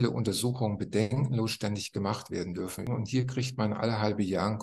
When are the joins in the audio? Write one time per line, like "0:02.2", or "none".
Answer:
0:02.9